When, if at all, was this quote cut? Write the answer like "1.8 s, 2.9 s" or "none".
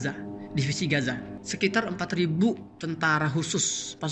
1.3 s